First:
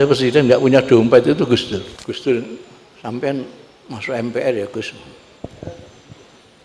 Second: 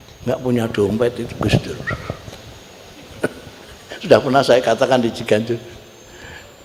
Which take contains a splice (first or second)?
first